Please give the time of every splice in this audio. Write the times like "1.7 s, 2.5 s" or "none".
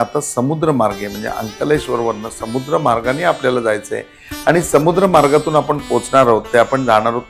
none